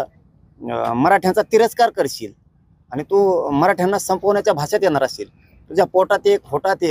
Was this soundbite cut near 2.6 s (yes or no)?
no